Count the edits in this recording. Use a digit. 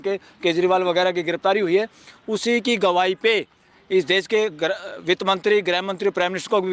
0